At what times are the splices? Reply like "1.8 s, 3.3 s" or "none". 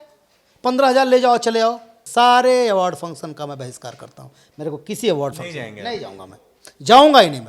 1.9 s